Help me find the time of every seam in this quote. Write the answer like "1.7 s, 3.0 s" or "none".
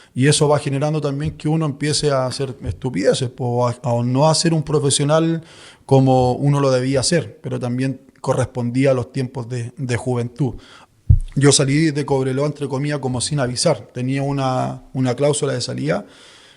10.7 s